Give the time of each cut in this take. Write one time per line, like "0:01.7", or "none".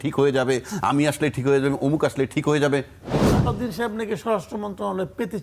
0:03.5